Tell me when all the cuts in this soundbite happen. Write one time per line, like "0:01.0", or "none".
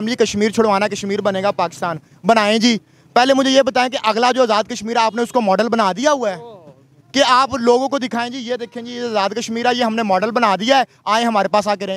none